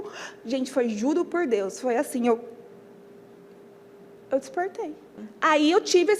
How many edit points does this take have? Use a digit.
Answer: 2